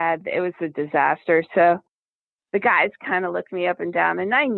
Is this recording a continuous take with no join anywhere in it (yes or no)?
no